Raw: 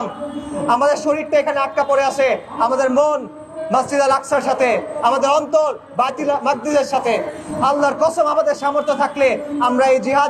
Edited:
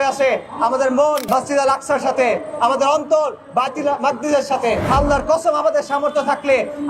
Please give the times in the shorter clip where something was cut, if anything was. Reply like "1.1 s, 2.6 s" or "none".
1.2 s, 4.9 s